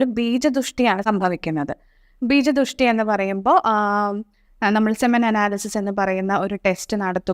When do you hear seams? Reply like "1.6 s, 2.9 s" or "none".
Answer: none